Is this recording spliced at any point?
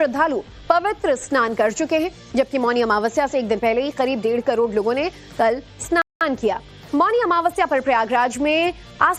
no; 0 cuts

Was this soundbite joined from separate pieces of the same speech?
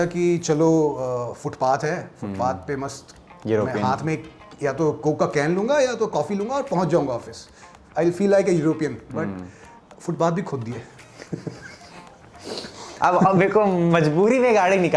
no; 0 cuts

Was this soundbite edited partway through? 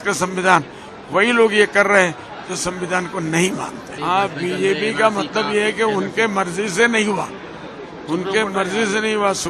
yes; 1 cut; at 3.9 s

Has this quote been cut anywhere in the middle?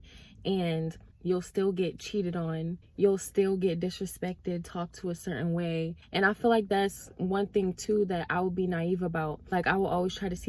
yes; 4 cuts; at 1.1 s, 2.8 s, 5.9 s, 9.4 s

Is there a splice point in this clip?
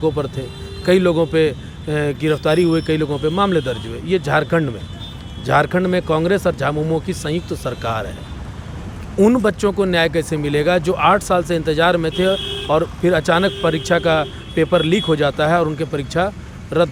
no; 0 cuts

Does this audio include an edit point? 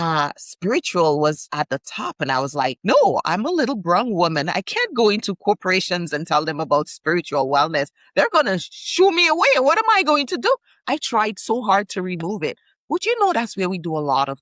yes; 1 cut; at 2.8 s

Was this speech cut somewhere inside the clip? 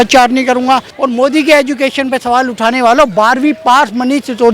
yes; 1 cut; at 0.9 s

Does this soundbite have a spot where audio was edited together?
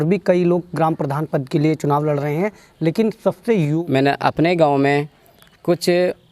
yes; 1 cut; at 3.7 s

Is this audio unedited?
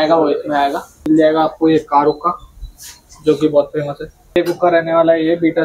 no; 2 cuts; at 0.9 s, 4.2 s

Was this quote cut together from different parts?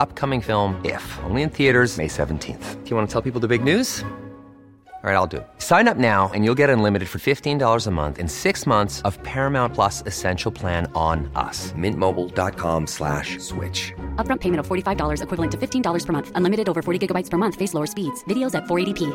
no; 0 cuts

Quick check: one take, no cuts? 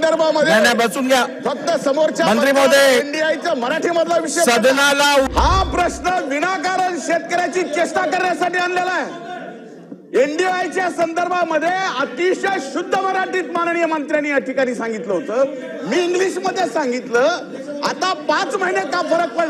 no; 1 cut; at 5.3 s

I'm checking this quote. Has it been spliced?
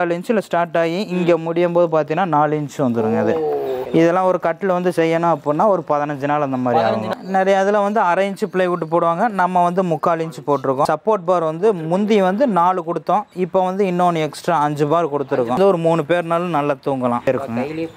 yes; 5 cuts; at 3.8 s, 7.1 s, 10.8 s, 15.6 s, 17.3 s

